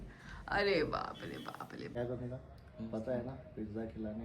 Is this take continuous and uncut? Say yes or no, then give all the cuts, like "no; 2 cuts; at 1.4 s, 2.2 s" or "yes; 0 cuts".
no; 1 cut; at 2.0 s